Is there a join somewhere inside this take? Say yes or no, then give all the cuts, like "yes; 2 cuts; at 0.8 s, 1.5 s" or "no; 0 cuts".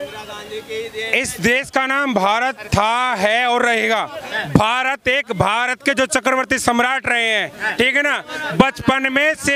no; 0 cuts